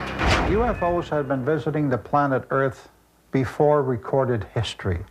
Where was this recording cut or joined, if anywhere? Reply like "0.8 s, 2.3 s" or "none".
3.2 s